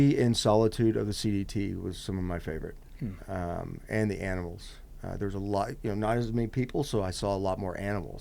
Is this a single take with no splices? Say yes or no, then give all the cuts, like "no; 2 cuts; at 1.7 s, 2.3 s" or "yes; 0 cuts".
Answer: yes; 0 cuts